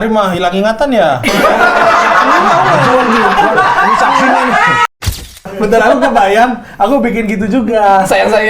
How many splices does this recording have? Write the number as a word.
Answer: one